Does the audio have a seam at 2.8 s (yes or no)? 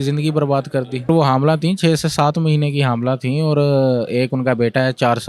no